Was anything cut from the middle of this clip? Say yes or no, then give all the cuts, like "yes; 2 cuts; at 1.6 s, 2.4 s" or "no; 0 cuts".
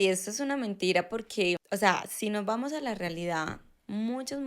yes; 1 cut; at 1.6 s